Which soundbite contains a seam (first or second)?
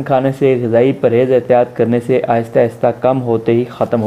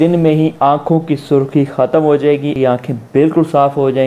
second